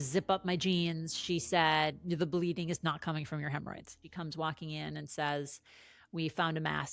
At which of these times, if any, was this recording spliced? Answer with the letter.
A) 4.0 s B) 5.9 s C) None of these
A